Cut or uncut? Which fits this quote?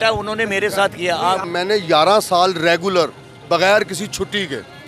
cut